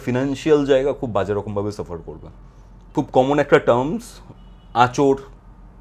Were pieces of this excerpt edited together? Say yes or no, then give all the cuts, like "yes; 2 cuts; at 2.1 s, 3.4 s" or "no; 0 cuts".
yes; 1 cut; at 2.8 s